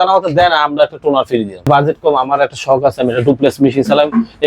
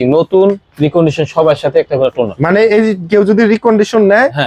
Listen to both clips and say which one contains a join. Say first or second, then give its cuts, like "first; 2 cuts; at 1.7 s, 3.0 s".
first; 1 cut; at 1.7 s